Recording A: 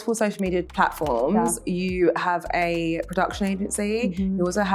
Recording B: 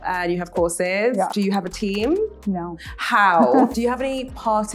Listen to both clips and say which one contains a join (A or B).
B